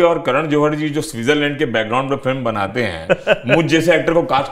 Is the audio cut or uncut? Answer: uncut